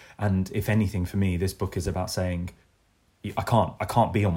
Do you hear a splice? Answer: no; 0 cuts

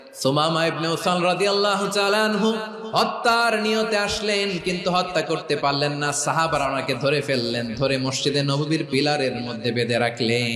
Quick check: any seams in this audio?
no; 0 cuts

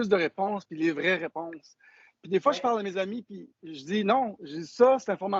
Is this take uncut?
yes; 0 cuts

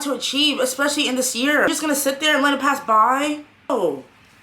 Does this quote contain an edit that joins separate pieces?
yes; 2 cuts; at 1.7 s, 3.7 s

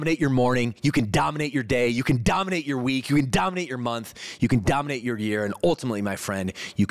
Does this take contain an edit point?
no; 0 cuts

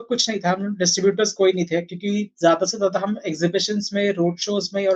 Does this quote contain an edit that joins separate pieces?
no; 0 cuts

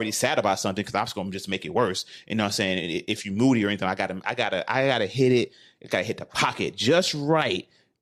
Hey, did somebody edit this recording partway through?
no; 0 cuts

